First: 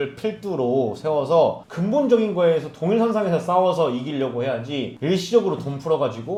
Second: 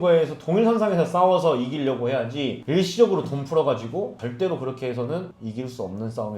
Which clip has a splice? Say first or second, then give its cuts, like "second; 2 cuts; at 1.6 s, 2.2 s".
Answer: second; 1 cut; at 5.3 s